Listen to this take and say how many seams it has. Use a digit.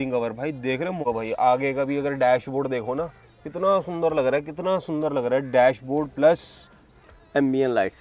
1